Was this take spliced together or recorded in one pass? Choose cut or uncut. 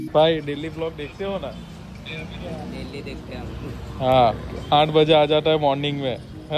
uncut